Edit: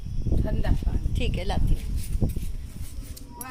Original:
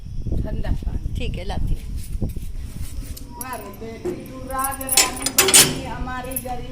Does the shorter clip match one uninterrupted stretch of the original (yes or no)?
yes